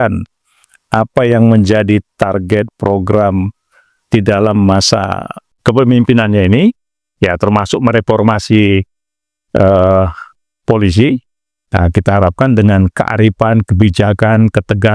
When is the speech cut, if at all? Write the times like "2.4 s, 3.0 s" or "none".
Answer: 5.5 s